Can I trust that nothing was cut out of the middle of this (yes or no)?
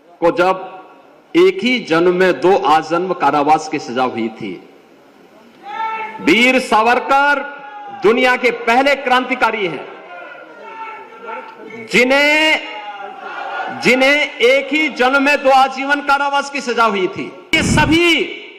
no